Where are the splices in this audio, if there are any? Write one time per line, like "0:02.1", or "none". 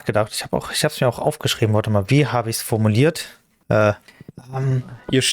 0:03.1
0:04.4

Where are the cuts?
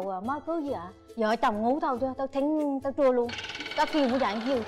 none

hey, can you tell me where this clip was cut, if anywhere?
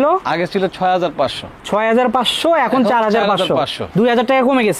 none

